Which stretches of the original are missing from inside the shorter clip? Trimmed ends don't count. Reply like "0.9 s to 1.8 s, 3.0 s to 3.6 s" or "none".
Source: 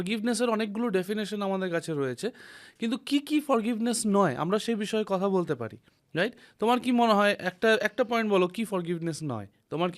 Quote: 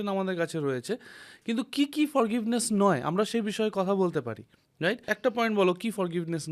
6.5 s to 7.9 s